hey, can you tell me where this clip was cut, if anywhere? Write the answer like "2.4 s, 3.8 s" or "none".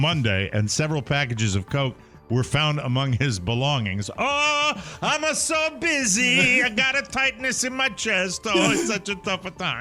none